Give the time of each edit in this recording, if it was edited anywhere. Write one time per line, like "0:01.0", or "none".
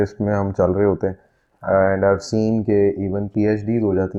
none